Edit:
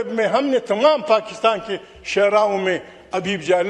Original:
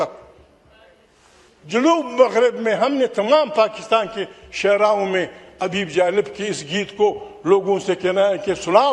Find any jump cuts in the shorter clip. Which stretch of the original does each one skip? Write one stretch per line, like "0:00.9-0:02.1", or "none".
none